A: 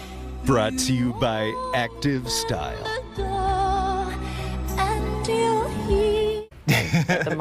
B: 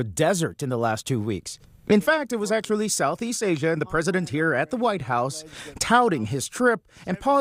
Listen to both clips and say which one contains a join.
A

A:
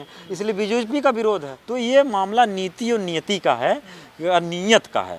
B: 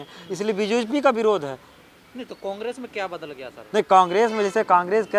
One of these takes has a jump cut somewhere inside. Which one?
A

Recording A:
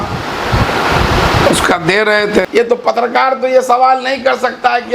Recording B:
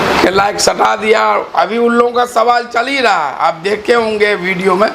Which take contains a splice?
A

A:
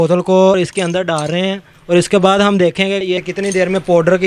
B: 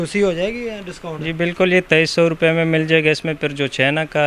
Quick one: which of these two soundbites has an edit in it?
A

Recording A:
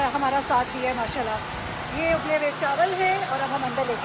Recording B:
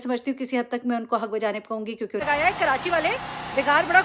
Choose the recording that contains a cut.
B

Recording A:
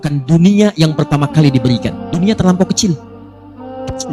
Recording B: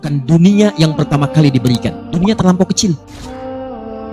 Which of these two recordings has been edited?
B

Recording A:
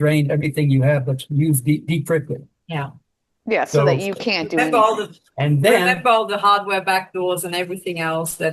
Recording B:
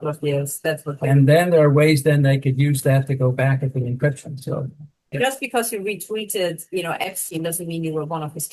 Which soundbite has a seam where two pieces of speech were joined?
B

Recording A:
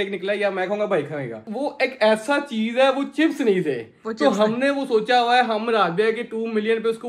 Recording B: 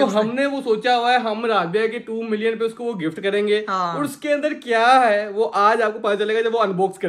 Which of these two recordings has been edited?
A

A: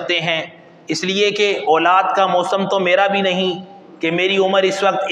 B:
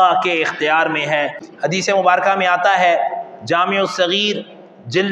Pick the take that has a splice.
B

